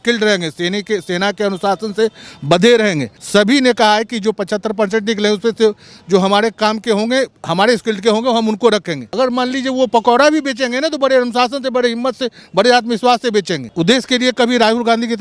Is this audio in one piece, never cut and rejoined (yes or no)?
no